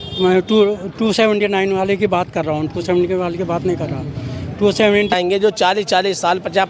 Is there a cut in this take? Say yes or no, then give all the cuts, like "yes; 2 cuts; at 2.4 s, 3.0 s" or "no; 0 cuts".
yes; 1 cut; at 5.1 s